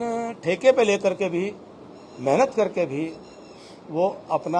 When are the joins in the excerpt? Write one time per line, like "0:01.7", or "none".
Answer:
none